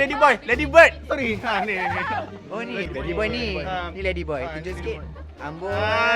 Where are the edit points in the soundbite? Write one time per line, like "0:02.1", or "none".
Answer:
0:02.9